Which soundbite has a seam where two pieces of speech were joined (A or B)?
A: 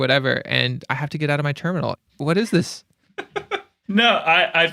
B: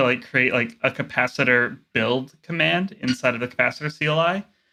A